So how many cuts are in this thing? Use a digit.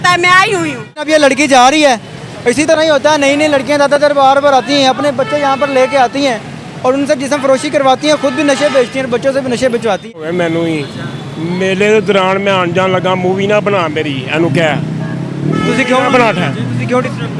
2